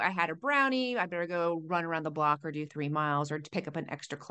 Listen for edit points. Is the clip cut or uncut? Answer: uncut